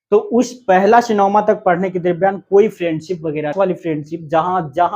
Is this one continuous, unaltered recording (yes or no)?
no